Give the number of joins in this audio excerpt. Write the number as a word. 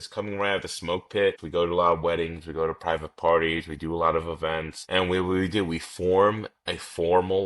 two